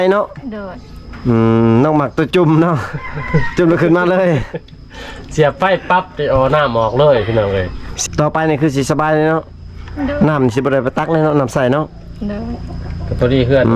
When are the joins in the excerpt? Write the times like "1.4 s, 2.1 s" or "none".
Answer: 7.9 s